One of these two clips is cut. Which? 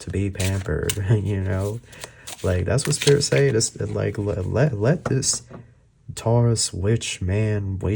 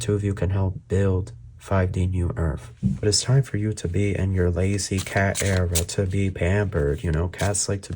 second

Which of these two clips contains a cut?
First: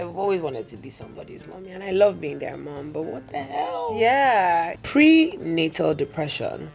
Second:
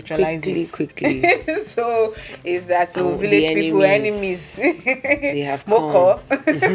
first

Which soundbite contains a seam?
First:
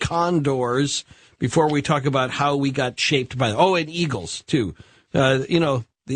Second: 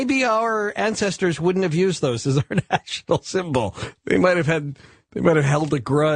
first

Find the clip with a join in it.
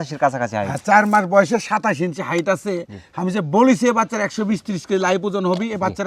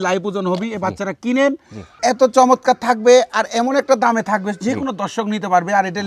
second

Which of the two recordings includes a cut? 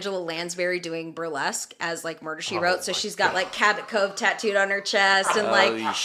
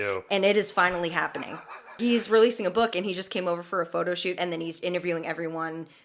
second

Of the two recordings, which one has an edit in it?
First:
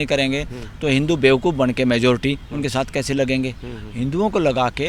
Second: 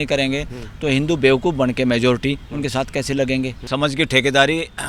second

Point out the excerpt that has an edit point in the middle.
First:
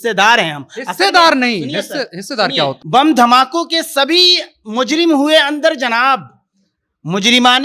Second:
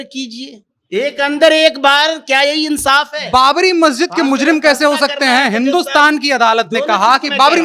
first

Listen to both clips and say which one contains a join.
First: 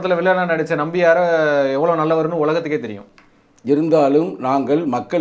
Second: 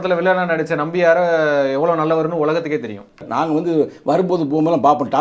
second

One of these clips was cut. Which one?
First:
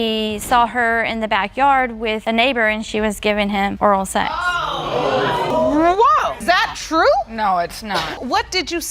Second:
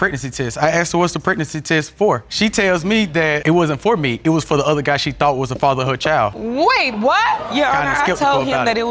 first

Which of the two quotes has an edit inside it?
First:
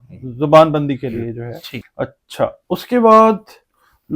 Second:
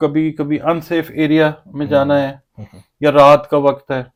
first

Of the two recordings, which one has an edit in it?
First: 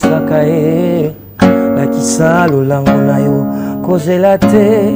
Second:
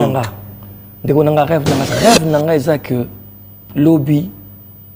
second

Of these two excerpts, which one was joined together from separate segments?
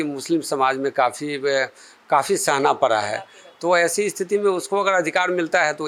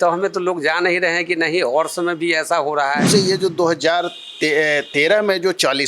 second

